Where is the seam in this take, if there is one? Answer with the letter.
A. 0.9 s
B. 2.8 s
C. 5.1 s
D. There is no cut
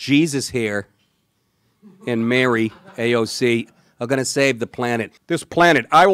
C